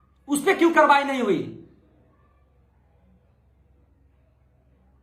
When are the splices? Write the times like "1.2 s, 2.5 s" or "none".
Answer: none